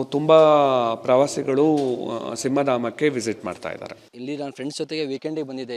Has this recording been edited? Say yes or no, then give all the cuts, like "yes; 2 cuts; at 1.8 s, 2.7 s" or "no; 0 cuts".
yes; 1 cut; at 3.9 s